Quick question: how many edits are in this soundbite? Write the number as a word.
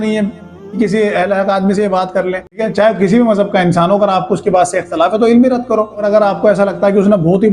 one